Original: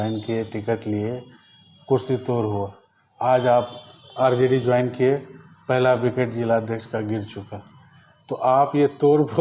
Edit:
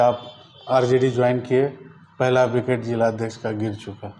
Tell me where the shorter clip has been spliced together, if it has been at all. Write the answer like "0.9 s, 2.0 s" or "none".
none